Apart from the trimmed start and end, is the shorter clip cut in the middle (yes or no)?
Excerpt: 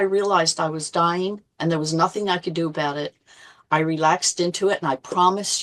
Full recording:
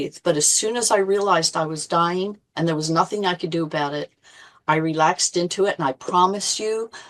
no